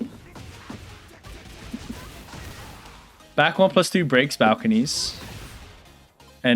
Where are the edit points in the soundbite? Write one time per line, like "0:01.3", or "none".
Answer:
0:03.3